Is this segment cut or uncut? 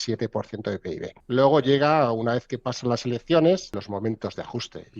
cut